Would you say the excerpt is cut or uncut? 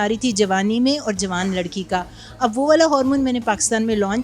uncut